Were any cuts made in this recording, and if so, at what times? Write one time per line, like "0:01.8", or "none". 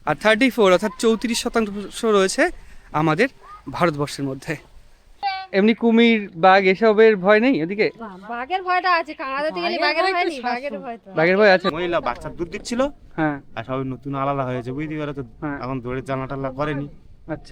0:05.1
0:11.7